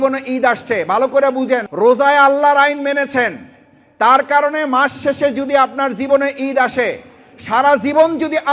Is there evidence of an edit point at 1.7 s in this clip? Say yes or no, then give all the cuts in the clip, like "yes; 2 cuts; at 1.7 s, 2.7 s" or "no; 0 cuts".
yes; 1 cut; at 1.7 s